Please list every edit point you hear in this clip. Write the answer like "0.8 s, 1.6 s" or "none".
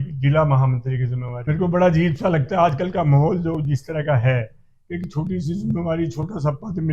1.3 s